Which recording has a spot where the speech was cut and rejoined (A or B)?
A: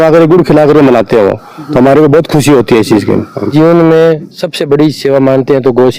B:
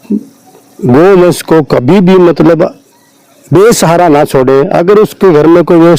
A